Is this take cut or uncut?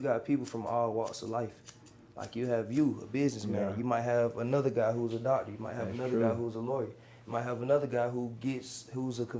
uncut